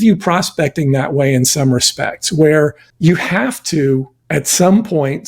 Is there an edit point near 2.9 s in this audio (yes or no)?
yes